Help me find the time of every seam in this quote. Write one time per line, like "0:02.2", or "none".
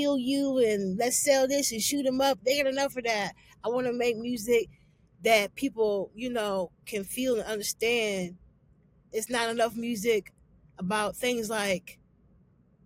none